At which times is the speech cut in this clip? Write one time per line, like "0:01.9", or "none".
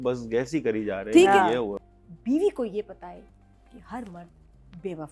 0:01.7